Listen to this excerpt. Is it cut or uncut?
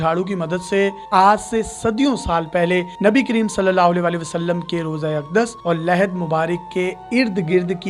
cut